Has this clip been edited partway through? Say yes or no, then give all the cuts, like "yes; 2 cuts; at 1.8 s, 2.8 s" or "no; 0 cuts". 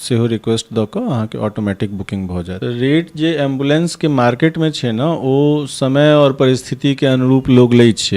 yes; 1 cut; at 2.6 s